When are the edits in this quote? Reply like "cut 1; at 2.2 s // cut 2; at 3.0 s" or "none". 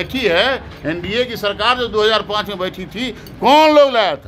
none